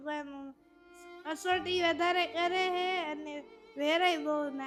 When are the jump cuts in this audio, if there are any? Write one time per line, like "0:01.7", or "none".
none